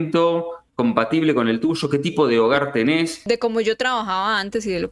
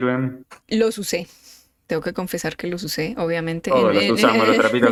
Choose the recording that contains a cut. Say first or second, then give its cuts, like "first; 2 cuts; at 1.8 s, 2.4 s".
first; 1 cut; at 3.2 s